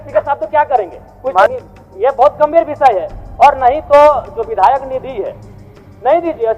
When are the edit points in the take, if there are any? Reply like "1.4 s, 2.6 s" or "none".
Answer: 1.5 s